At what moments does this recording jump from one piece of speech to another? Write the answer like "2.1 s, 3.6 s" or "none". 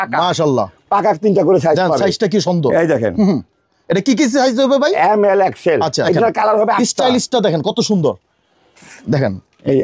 6.1 s